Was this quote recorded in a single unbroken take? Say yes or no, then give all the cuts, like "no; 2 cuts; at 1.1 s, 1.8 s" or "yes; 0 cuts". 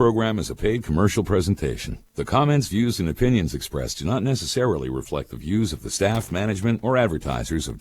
no; 1 cut; at 4.1 s